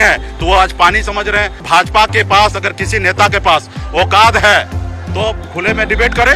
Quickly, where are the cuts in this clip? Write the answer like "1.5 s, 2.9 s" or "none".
1.6 s